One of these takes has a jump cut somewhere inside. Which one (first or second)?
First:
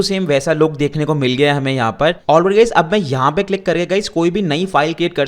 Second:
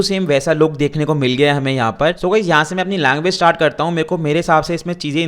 second